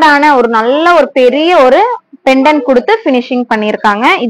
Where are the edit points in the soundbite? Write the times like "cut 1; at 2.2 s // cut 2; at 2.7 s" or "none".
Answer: none